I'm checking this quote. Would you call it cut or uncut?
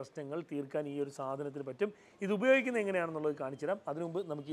uncut